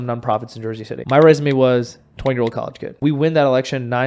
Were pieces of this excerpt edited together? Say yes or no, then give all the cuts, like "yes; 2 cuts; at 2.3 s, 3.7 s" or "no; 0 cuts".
yes; 2 cuts; at 0.9 s, 2.8 s